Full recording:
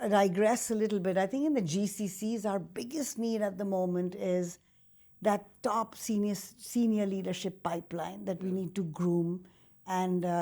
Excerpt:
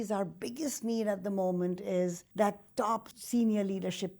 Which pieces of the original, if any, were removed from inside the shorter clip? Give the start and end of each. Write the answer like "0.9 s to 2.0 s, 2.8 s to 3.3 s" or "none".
4.6 s to 5.1 s, 6.0 s to 6.5 s